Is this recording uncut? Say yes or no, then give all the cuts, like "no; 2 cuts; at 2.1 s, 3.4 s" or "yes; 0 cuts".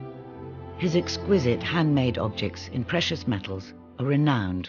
yes; 0 cuts